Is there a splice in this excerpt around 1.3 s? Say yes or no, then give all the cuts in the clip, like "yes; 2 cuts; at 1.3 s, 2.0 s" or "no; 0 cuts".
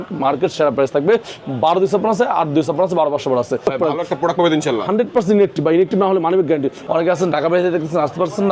no; 2 cuts; at 3.6 s, 6.8 s